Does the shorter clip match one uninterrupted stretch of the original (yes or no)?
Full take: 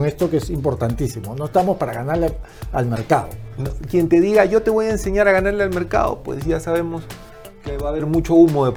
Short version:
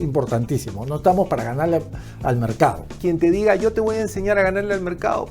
no